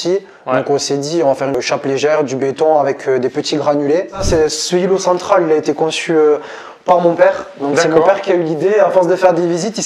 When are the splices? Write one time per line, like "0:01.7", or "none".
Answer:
0:01.6
0:04.2